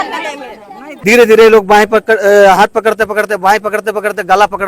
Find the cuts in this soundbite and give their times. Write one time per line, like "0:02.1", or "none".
0:00.9